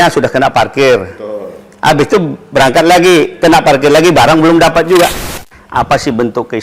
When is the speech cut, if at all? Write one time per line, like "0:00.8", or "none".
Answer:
0:05.4